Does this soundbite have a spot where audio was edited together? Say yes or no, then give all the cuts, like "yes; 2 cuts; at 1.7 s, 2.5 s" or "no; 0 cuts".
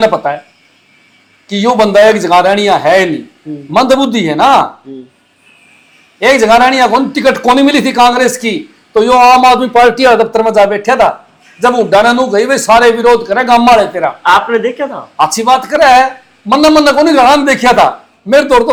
no; 0 cuts